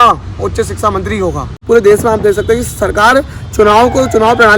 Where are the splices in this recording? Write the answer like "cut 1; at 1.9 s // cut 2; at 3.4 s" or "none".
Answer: cut 1; at 1.6 s